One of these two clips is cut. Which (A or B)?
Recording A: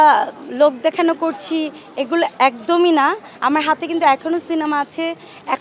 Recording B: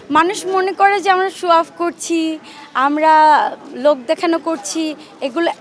A